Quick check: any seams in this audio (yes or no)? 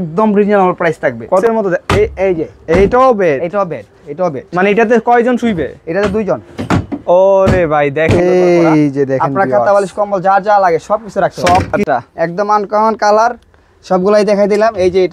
yes